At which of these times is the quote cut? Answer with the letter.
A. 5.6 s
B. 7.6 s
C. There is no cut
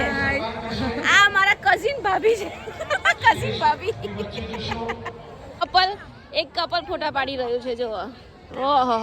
A